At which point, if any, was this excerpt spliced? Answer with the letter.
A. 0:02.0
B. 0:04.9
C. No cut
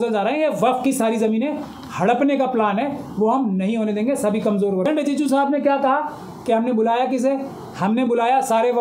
B